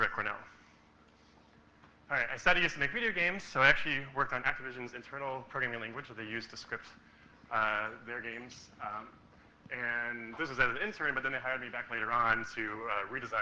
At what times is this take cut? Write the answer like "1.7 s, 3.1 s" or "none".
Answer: 1.8 s